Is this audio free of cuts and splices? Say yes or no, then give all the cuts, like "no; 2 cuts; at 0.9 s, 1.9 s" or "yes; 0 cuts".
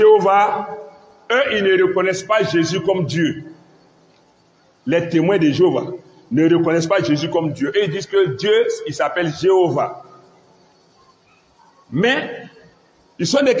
yes; 0 cuts